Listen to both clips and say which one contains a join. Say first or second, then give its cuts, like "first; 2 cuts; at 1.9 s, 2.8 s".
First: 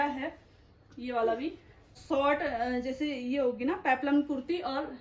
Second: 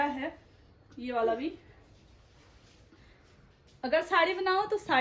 first; 1 cut; at 2.0 s